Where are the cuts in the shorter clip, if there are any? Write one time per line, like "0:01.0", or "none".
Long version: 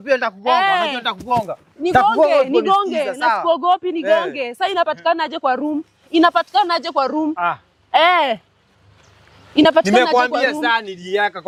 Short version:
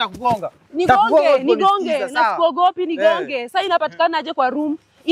none